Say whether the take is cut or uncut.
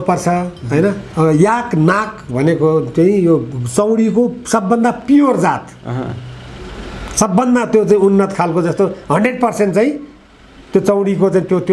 cut